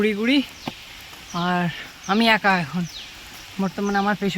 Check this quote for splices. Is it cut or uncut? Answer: uncut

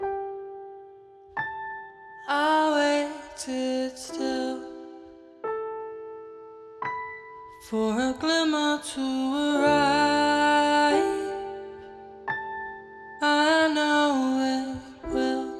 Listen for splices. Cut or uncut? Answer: uncut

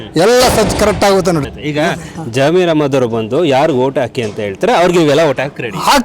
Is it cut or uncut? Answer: cut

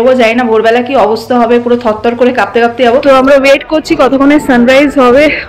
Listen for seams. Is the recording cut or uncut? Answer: cut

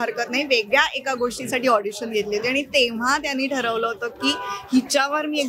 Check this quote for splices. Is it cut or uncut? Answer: uncut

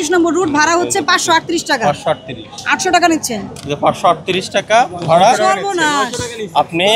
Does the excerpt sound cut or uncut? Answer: uncut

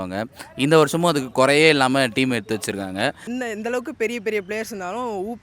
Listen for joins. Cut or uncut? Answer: cut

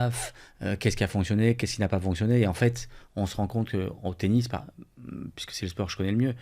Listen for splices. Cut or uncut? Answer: uncut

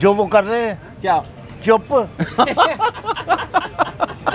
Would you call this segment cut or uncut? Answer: uncut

